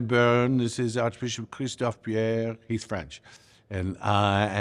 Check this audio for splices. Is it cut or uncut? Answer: uncut